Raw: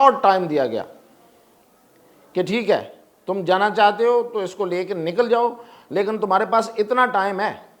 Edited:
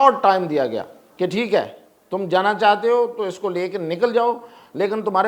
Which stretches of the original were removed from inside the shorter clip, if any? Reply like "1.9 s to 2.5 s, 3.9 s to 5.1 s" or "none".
1.0 s to 2.2 s